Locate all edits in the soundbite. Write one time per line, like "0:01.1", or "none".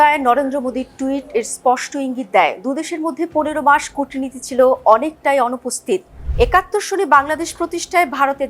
0:06.1